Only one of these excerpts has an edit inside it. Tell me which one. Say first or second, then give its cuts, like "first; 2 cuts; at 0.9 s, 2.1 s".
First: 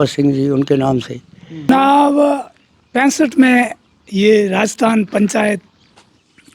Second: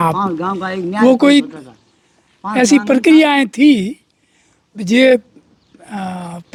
first; 1 cut; at 1.7 s